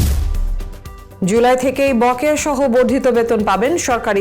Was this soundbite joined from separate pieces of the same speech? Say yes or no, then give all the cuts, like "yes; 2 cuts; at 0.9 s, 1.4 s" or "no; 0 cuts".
yes; 1 cut; at 1.2 s